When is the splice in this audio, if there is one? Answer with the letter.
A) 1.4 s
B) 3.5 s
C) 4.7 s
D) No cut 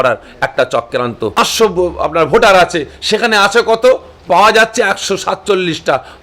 A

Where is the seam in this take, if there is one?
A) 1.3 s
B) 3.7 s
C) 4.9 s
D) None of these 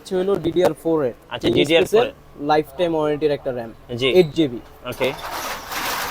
D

